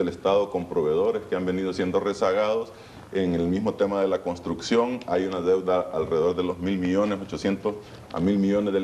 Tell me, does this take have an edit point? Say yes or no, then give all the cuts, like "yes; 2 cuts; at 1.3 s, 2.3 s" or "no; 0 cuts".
yes; 1 cut; at 3.9 s